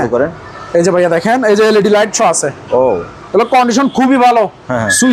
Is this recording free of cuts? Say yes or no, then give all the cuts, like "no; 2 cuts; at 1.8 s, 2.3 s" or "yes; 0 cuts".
yes; 0 cuts